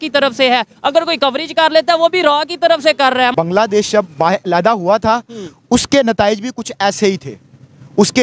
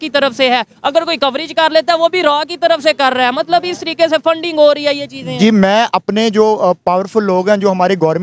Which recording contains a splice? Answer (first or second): first